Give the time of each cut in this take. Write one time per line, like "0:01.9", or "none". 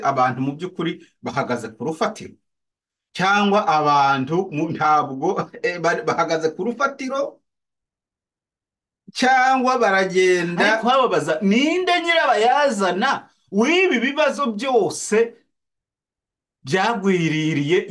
0:10.8